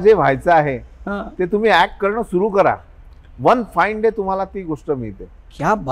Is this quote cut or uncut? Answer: uncut